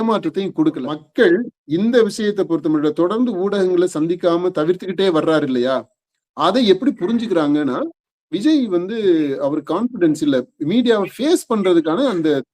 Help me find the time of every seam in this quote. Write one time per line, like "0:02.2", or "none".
0:00.9